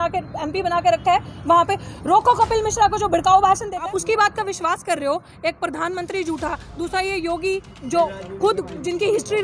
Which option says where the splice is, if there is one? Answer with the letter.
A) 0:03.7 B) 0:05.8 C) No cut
A